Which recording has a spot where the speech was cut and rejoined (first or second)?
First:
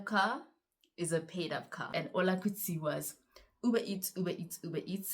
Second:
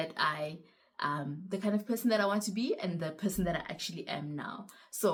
first